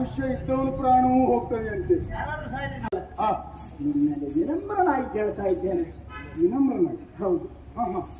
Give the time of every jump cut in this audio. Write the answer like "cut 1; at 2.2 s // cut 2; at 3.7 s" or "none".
cut 1; at 2.9 s